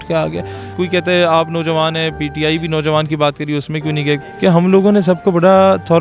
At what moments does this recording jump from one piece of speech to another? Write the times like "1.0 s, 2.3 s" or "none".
0.7 s, 4.2 s